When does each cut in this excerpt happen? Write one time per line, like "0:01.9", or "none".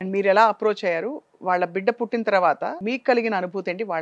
0:02.8